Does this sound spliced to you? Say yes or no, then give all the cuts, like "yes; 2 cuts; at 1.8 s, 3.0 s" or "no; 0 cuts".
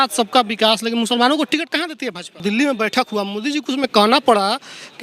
yes; 1 cut; at 2.4 s